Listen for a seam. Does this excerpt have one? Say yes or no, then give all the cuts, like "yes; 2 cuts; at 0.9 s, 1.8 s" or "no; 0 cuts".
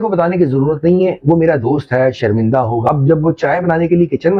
yes; 1 cut; at 2.8 s